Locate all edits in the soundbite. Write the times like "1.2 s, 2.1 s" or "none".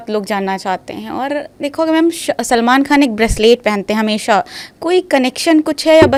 none

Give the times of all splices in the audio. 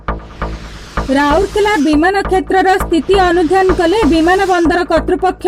1.0 s

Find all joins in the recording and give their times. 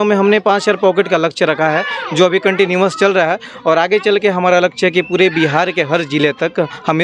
none

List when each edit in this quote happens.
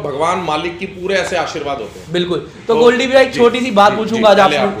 none

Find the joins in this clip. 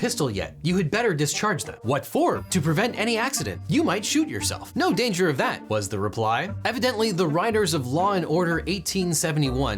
2.4 s, 3.5 s, 5.6 s

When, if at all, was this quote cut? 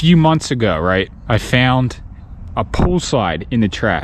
1.2 s

